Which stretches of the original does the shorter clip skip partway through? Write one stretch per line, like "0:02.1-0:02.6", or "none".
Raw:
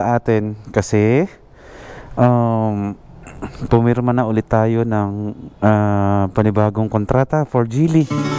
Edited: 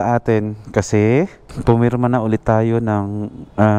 0:01.4-0:03.5